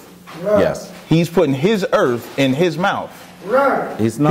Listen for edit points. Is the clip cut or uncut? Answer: uncut